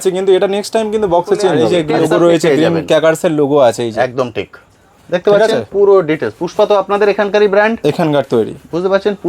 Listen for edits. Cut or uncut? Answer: cut